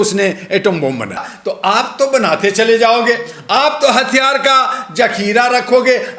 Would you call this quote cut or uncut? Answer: cut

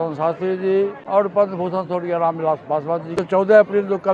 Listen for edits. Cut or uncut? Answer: cut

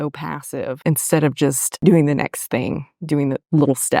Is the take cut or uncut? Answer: cut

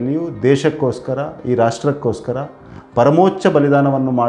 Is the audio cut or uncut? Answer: uncut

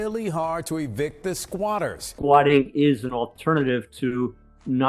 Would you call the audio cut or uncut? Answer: cut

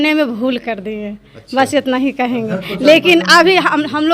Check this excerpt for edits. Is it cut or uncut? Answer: uncut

